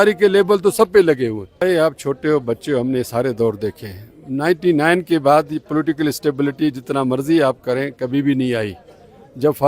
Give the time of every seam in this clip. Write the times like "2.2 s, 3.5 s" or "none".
1.6 s